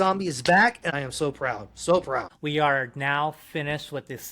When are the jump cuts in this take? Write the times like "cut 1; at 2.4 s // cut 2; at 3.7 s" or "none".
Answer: cut 1; at 0.9 s // cut 2; at 2.3 s